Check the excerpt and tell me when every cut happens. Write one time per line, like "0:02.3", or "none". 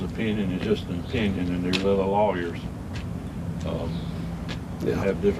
none